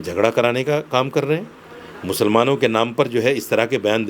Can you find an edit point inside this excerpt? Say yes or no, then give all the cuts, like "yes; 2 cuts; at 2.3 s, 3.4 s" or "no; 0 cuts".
no; 0 cuts